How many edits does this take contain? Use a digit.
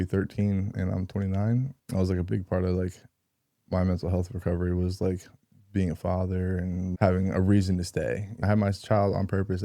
3